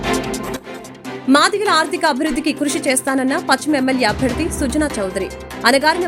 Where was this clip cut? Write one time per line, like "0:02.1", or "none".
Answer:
0:00.9